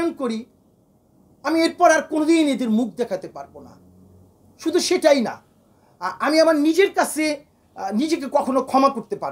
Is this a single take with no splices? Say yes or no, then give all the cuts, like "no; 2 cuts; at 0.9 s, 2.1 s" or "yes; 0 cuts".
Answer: yes; 0 cuts